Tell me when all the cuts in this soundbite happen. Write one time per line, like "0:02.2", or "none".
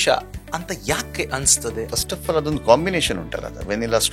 0:01.9